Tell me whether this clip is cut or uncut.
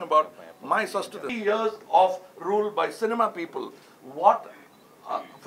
cut